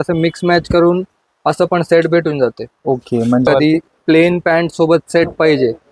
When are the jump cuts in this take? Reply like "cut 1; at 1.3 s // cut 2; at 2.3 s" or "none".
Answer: cut 1; at 3.5 s